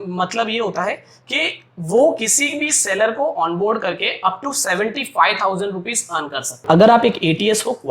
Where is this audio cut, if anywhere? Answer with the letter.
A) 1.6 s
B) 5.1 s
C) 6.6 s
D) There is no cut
C